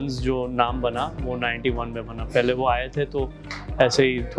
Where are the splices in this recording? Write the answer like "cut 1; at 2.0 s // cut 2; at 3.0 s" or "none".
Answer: none